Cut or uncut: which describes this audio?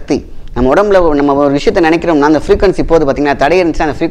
uncut